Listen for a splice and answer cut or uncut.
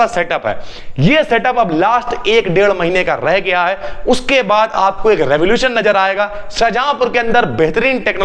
uncut